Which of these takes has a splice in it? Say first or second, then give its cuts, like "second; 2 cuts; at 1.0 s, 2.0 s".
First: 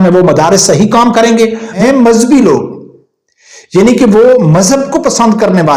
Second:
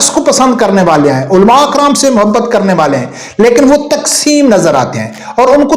first; 1 cut; at 1.7 s